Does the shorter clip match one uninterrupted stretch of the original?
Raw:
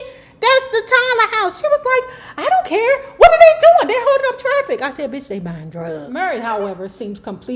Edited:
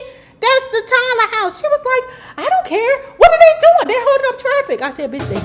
yes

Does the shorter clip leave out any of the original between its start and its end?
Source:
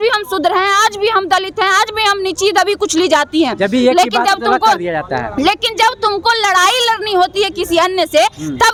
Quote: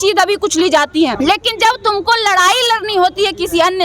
yes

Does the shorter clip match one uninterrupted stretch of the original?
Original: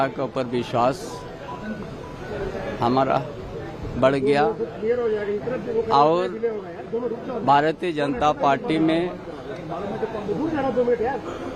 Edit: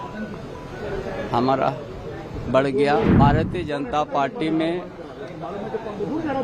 no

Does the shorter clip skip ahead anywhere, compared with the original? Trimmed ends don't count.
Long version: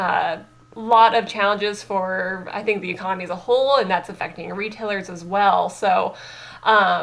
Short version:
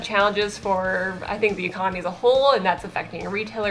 no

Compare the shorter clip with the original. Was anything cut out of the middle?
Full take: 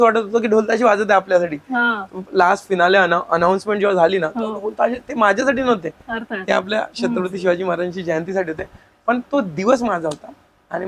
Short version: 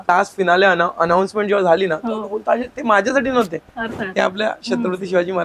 no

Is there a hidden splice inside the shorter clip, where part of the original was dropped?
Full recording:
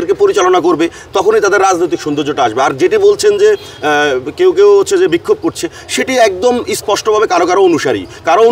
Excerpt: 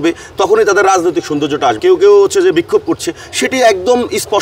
yes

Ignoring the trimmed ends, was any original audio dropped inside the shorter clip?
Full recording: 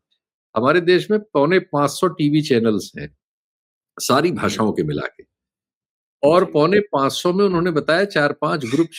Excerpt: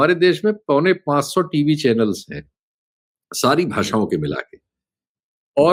no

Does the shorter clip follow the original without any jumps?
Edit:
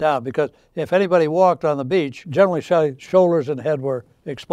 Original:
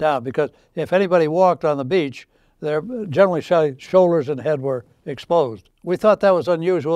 no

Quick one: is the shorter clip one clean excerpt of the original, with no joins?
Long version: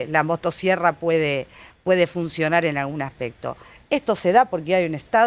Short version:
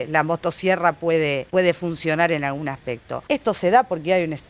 no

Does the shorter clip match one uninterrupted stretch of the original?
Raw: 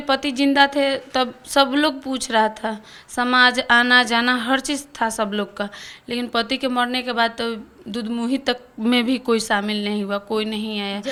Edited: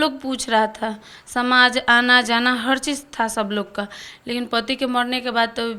yes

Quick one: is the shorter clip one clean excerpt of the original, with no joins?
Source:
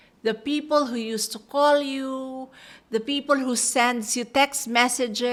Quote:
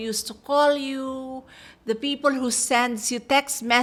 yes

